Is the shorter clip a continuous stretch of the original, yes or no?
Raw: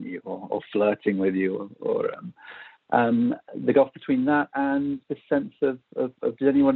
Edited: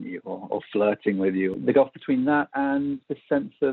no